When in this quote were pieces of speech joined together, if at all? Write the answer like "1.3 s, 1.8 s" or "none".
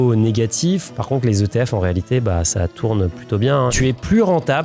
1.0 s, 3.7 s